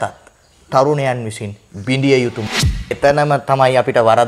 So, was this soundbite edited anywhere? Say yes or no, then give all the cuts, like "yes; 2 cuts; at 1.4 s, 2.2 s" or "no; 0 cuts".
yes; 1 cut; at 2.8 s